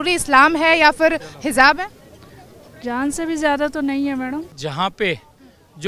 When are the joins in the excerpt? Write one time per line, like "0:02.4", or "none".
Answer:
0:04.5